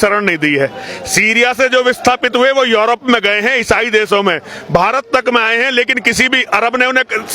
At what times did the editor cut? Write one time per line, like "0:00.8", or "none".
none